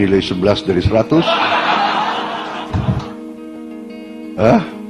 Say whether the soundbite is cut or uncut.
cut